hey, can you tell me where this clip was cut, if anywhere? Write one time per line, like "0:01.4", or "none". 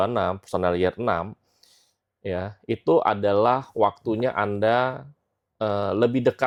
none